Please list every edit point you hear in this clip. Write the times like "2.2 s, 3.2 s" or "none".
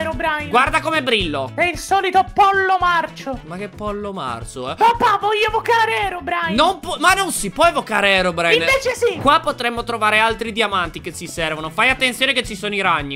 1.5 s, 9.2 s